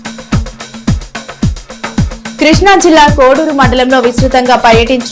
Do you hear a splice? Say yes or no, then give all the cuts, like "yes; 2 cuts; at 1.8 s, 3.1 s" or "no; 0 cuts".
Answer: no; 0 cuts